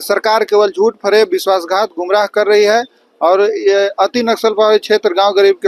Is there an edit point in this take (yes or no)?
no